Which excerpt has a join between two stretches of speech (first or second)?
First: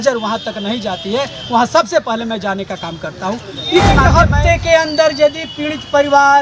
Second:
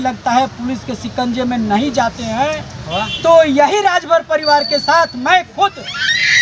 first